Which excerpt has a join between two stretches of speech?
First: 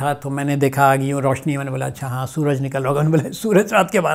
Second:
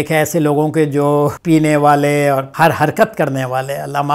second; 2 cuts; at 1.3 s, 2.5 s

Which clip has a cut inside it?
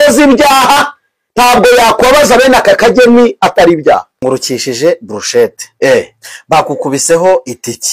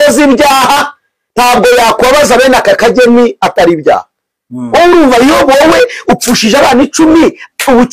first; 1 cut; at 4.2 s

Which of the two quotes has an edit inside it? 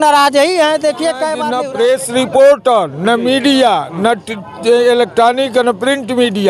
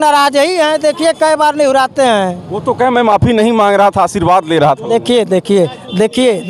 first; 1 cut; at 1.5 s

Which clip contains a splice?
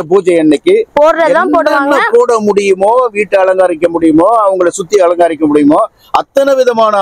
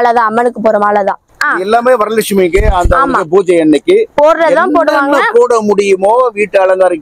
second; 1 cut; at 1.3 s

